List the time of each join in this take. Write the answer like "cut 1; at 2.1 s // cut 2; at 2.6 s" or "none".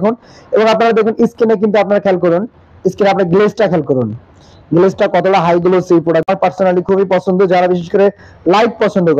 cut 1; at 6.3 s

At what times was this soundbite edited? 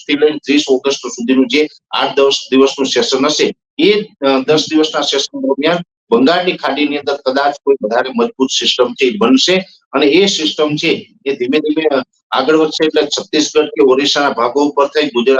none

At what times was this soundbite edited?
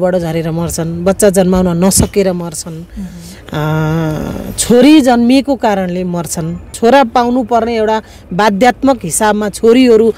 cut 1; at 6.7 s

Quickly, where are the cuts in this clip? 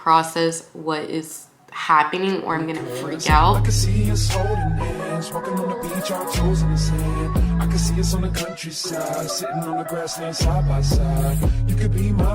cut 1; at 3.6 s

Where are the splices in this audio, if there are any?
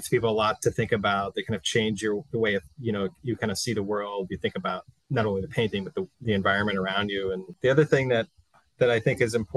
cut 1; at 4.9 s // cut 2; at 6.1 s // cut 3; at 7.5 s

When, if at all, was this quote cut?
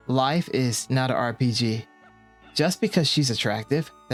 none

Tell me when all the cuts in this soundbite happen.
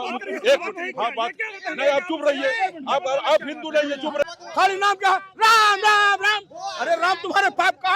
cut 1; at 4.2 s

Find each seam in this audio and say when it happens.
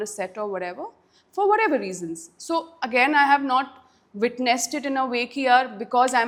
none

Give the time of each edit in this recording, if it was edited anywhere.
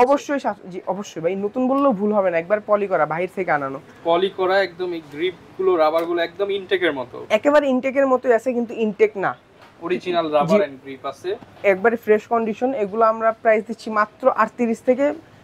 none

